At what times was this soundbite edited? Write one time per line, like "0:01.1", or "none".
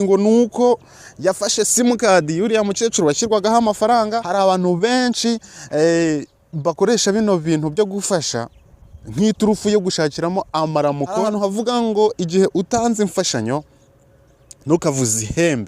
0:04.2
0:11.2